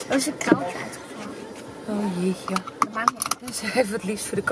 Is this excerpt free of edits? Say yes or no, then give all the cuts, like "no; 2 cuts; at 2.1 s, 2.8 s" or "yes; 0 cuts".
yes; 0 cuts